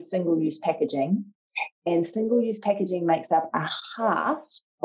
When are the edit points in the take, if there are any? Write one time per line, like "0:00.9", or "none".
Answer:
none